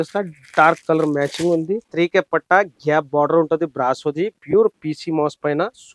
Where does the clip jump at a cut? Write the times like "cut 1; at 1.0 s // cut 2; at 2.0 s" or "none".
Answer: cut 1; at 1.9 s